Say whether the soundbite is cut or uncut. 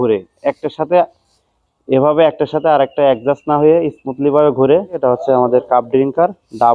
cut